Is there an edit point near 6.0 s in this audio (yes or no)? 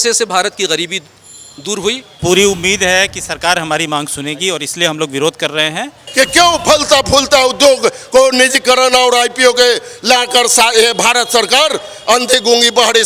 yes